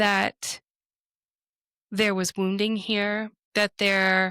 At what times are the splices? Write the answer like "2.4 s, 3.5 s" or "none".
3.4 s